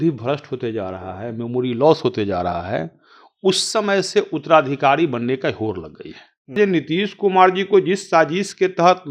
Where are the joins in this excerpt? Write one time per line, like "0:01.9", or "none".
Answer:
0:06.6

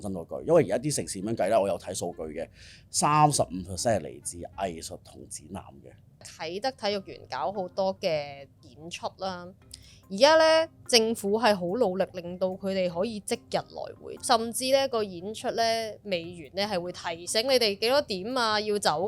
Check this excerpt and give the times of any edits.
0:06.3
0:14.1

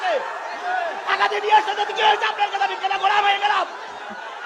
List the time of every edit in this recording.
none

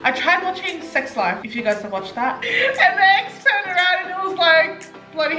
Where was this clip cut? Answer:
0:01.5
0:02.5

